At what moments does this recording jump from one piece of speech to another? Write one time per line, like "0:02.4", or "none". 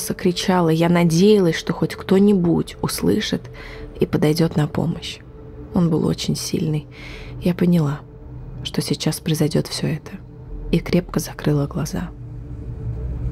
none